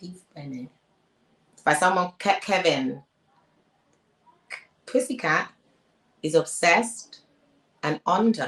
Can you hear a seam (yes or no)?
no